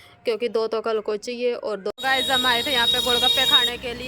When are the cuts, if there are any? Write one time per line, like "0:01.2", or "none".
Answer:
0:01.9